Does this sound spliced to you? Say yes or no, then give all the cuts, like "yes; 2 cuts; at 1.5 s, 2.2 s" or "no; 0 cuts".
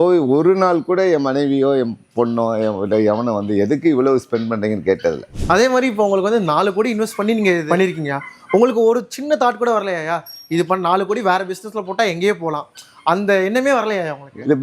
yes; 1 cut; at 5.3 s